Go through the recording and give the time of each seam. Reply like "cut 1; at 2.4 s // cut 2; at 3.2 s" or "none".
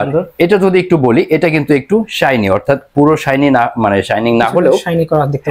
none